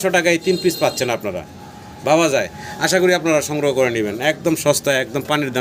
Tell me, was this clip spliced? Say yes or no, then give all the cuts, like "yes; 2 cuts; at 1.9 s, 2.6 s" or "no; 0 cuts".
no; 0 cuts